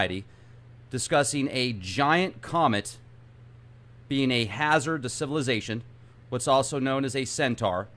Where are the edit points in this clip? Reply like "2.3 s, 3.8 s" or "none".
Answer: 4.2 s